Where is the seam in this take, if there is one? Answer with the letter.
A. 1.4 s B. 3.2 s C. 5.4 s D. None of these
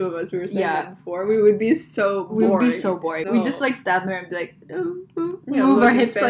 B